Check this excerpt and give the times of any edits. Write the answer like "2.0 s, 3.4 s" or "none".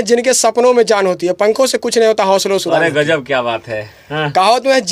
none